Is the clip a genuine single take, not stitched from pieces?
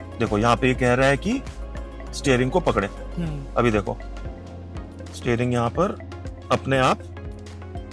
yes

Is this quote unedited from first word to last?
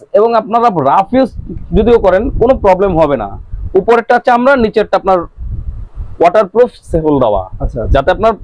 yes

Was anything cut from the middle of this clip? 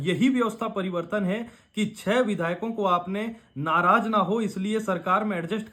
no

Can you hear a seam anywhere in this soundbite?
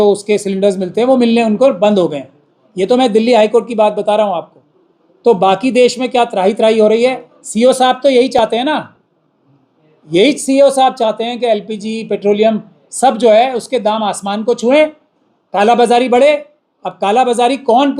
no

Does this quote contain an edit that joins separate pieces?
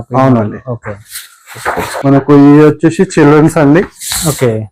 no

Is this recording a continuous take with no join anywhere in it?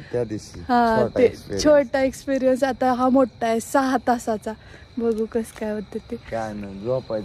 yes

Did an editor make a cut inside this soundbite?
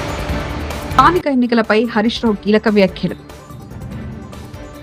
no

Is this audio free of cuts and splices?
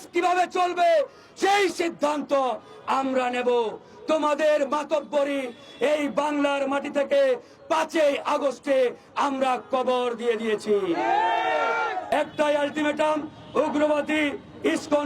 no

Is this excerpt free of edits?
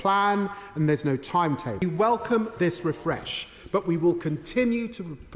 no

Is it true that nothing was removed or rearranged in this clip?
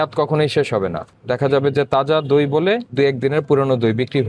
no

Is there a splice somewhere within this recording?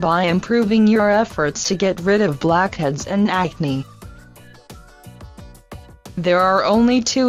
no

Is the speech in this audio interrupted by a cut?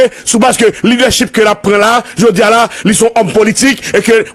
no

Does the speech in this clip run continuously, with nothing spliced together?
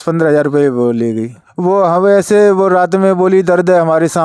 no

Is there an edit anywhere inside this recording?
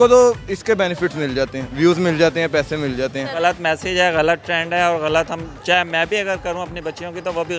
yes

